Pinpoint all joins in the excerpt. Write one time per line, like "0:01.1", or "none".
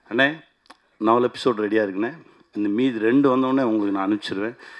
none